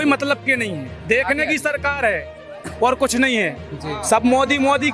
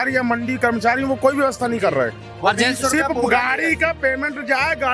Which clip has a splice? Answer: first; 1 cut; at 0.9 s

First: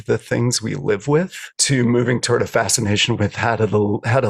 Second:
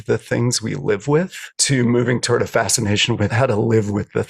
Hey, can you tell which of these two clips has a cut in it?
second; 1 cut; at 3.3 s

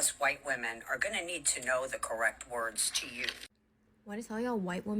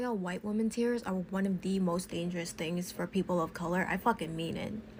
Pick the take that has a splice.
first; 1 cut; at 3.5 s

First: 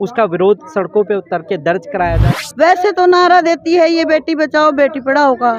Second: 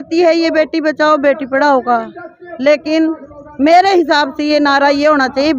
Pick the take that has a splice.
first; 1 cut; at 2.2 s

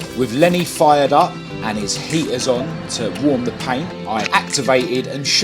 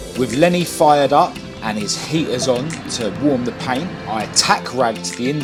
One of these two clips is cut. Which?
first; 1 cut; at 4.2 s

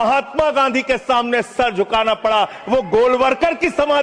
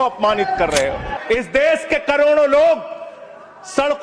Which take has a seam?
second; 1 cut; at 1.1 s

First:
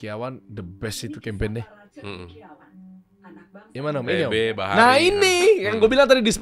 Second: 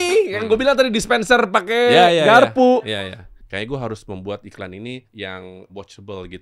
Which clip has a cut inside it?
second; 2 cuts; at 3.4 s, 5.3 s

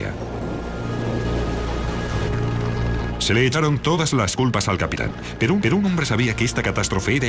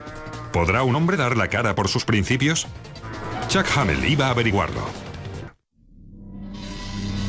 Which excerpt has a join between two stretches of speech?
first; 1 cut; at 3.1 s

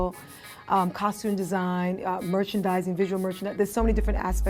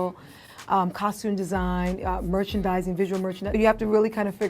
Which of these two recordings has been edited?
second; 1 cut; at 3.5 s

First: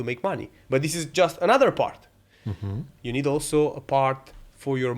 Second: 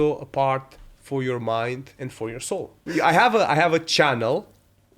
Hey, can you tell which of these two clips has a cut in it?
second; 1 cut; at 2.8 s

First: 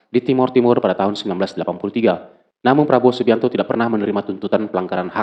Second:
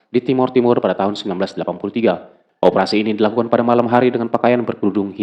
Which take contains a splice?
second; 1 cut; at 2.4 s

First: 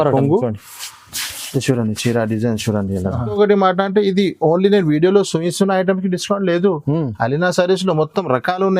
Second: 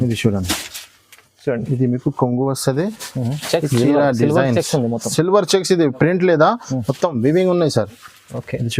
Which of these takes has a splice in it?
first; 1 cut; at 3.3 s

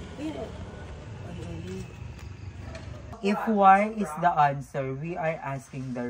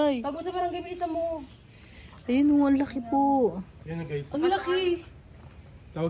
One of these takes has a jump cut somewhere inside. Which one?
first; 1 cut; at 3.1 s

